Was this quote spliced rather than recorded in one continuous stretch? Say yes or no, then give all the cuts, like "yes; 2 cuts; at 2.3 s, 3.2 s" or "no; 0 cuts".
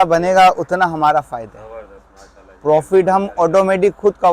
no; 0 cuts